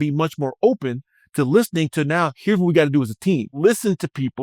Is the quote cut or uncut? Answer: cut